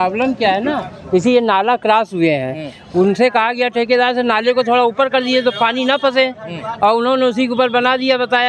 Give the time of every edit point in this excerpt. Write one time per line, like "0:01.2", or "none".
none